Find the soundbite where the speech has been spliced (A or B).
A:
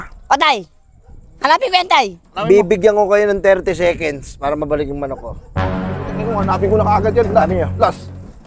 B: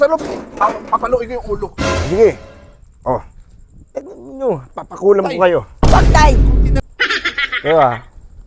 B